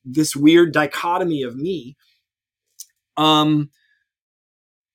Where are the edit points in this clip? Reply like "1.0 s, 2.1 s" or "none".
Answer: none